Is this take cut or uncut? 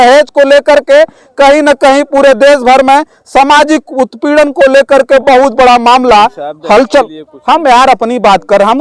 uncut